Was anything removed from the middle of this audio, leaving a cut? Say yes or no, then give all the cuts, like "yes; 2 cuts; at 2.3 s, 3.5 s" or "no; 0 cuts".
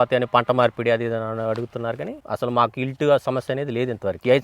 yes; 1 cut; at 2.1 s